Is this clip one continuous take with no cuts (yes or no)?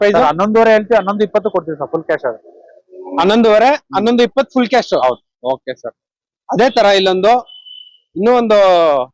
yes